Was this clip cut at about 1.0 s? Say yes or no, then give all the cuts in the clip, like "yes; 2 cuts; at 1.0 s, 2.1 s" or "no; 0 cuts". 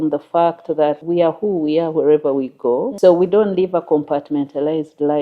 yes; 2 cuts; at 1.0 s, 2.9 s